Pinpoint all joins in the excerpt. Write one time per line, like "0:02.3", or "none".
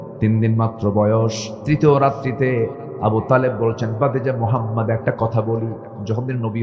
0:01.5